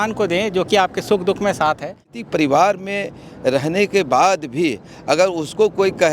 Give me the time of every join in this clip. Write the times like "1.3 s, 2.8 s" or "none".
2.0 s